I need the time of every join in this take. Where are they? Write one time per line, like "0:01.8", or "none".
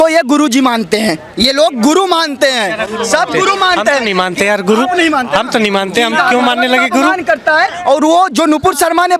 none